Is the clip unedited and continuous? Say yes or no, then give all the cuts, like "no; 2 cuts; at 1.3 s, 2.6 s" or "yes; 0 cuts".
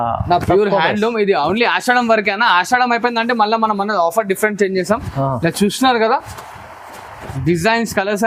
yes; 0 cuts